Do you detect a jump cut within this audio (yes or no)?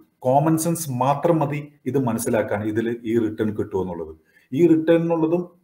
no